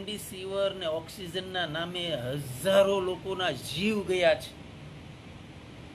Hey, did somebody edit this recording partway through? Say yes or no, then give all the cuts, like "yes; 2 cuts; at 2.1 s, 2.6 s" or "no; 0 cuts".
no; 0 cuts